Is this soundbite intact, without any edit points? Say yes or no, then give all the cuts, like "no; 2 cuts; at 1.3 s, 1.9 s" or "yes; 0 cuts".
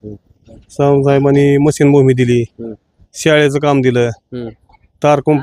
yes; 0 cuts